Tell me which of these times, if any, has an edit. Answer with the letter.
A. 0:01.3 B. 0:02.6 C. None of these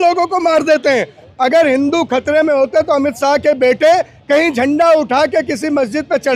A